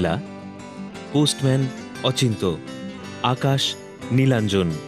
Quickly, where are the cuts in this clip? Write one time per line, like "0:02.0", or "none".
none